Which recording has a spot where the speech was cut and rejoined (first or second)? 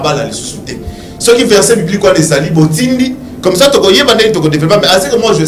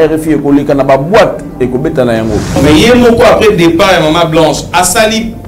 second